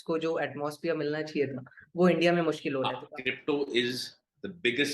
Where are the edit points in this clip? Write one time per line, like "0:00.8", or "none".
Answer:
0:03.0